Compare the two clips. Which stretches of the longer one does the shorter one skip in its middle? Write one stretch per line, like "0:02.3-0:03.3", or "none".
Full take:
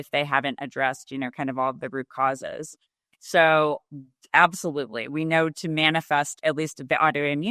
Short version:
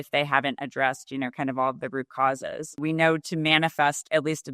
0:02.7-0:05.0